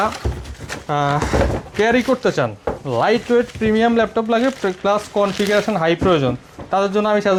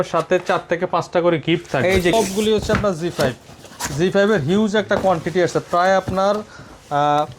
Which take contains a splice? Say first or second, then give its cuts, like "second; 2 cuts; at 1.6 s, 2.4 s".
second; 1 cut; at 2.1 s